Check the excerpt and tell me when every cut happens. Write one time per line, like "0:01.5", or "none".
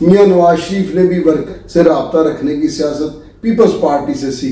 0:01.4